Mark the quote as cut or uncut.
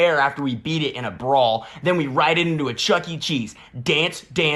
uncut